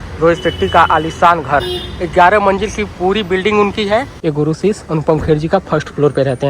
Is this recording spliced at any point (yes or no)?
yes